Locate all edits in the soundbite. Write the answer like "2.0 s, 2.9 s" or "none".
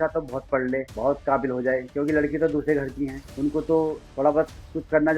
0.9 s, 3.2 s, 4.0 s